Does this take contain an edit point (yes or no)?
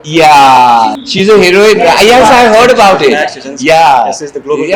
yes